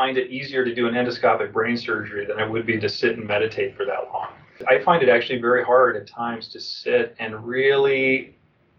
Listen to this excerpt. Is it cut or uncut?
cut